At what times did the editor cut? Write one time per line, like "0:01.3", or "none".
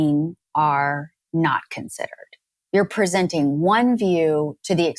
none